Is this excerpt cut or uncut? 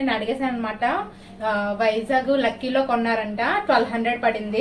uncut